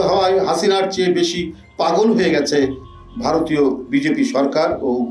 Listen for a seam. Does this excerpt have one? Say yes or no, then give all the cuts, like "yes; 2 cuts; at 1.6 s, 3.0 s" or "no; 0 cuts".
no; 0 cuts